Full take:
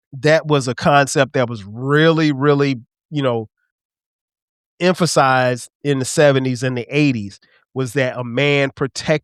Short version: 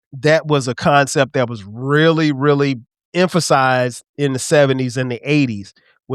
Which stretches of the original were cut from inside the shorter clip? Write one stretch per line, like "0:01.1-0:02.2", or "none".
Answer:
0:02.9-0:04.6